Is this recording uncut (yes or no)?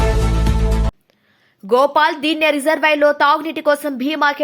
yes